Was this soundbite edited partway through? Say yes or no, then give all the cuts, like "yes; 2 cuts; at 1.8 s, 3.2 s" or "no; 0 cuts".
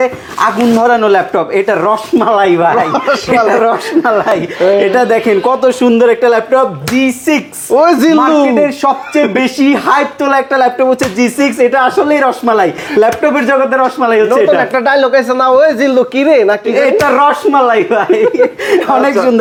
no; 0 cuts